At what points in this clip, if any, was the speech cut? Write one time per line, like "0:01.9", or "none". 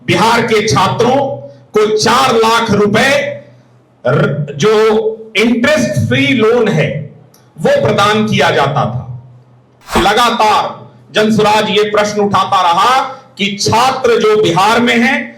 0:10.0